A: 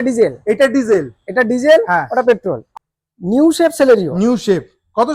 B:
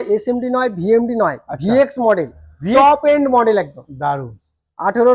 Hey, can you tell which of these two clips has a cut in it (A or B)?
A